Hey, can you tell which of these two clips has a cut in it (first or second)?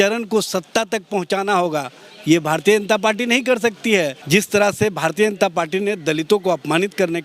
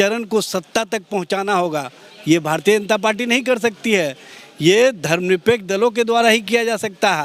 first